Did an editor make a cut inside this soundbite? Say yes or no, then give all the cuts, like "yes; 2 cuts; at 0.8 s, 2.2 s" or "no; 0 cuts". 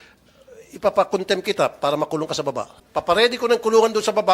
yes; 1 cut; at 2.7 s